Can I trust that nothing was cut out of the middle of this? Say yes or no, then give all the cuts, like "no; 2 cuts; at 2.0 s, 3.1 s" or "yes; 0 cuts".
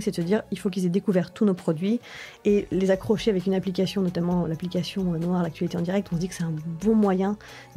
yes; 0 cuts